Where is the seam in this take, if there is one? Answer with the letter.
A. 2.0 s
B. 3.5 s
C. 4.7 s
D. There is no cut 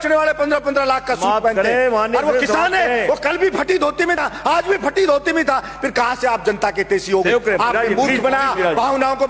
D